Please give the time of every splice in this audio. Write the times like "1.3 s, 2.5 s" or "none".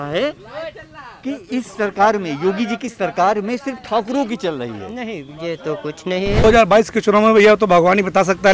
6.4 s